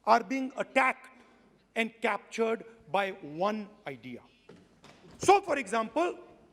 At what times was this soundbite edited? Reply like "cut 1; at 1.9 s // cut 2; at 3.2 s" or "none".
cut 1; at 5.1 s